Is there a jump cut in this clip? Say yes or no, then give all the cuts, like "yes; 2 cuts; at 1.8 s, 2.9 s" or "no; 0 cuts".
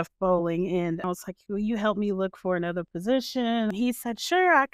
yes; 2 cuts; at 1.0 s, 3.7 s